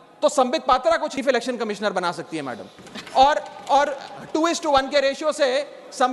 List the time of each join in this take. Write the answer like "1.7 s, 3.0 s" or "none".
1.2 s

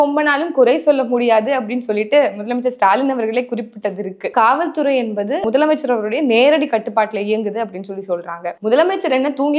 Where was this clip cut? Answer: 4.3 s, 5.4 s, 8.5 s

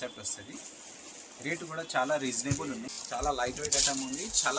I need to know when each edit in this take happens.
2.9 s

